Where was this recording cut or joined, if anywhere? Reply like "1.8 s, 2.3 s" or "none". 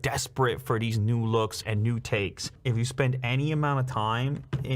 2.5 s